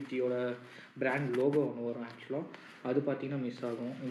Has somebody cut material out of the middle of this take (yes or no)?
no